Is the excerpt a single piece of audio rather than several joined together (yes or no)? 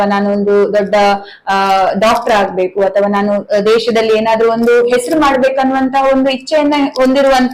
yes